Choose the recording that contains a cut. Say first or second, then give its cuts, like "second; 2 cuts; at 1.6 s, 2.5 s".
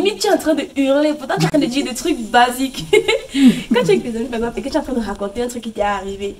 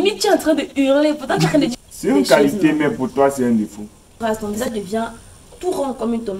second; 2 cuts; at 1.7 s, 4.2 s